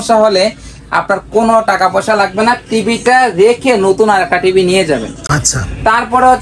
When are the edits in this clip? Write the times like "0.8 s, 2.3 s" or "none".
none